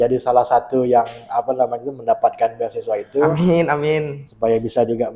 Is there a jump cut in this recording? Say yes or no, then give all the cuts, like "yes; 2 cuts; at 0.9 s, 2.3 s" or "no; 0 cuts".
no; 0 cuts